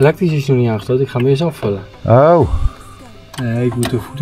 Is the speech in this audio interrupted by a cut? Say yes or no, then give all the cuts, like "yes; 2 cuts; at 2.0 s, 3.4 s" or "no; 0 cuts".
no; 0 cuts